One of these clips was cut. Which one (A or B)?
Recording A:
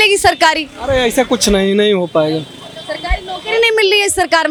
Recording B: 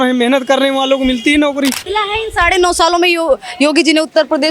B